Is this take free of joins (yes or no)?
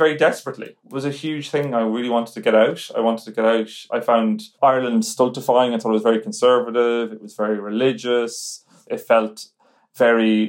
no